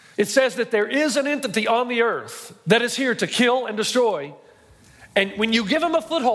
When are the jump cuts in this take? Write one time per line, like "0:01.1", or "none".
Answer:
none